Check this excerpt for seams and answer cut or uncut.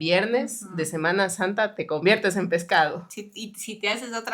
uncut